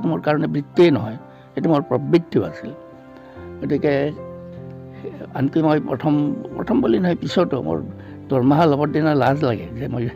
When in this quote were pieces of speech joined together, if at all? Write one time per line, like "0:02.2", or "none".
none